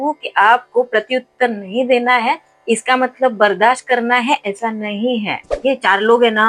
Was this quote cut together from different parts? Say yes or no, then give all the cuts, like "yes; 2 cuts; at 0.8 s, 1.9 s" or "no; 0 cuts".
yes; 1 cut; at 5.5 s